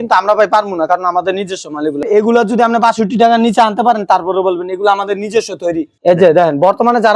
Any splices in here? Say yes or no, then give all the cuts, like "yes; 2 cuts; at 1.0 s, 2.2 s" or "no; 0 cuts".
yes; 2 cuts; at 2.0 s, 5.9 s